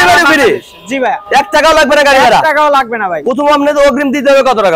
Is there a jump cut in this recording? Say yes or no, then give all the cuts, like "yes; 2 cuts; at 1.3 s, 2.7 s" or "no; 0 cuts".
no; 0 cuts